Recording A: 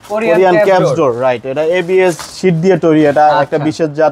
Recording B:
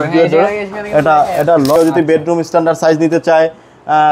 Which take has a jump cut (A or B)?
B